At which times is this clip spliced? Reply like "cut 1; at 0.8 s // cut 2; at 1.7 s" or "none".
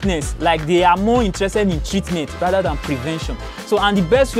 none